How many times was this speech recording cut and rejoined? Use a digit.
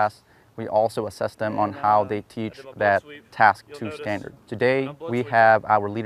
2